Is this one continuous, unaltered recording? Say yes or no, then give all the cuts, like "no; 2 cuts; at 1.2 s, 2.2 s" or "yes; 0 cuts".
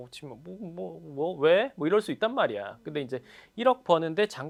yes; 0 cuts